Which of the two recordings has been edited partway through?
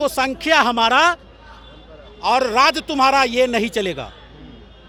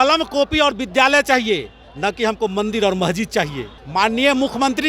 second; 1 cut; at 3.8 s

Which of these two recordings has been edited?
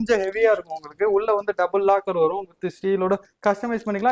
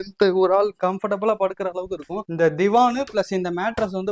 second; 1 cut; at 2.2 s

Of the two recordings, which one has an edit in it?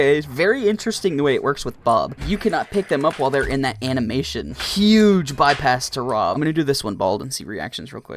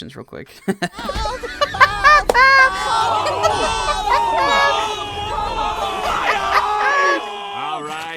first; 3 cuts; at 2.2 s, 4.6 s, 6.3 s

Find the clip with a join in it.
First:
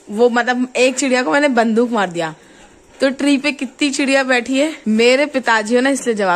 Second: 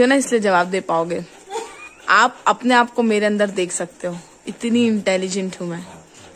first; 1 cut; at 4.8 s

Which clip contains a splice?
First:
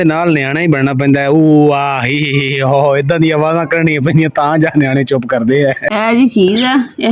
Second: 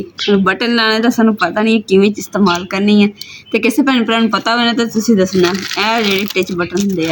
first; 1 cut; at 5.8 s

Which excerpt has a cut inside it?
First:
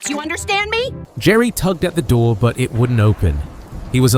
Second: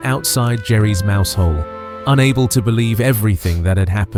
first; 1 cut; at 1.0 s

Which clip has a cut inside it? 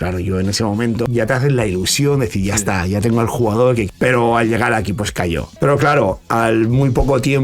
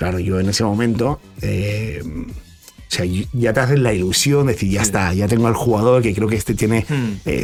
first; 3 cuts; at 1.1 s, 3.9 s, 5.5 s

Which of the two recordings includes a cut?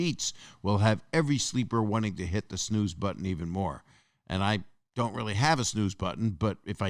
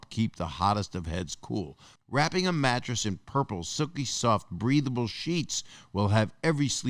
second; 1 cut; at 1.8 s

